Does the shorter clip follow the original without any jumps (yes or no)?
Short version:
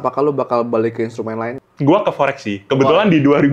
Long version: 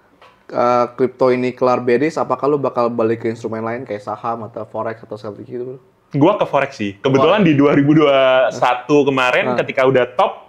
no